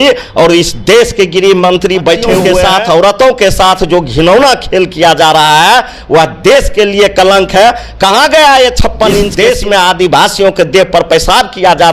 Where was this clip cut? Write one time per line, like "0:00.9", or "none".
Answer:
0:02.5
0:09.3

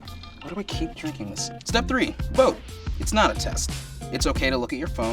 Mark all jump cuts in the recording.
0:01.5

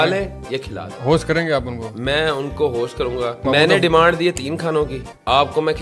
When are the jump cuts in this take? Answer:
none

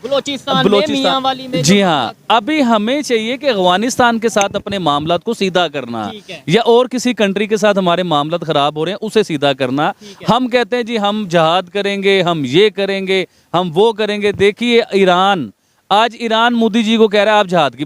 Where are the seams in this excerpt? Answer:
none

